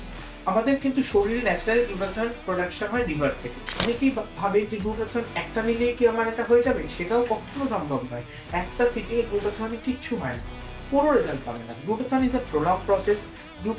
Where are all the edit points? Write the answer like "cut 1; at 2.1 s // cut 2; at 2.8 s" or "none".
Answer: cut 1; at 3.8 s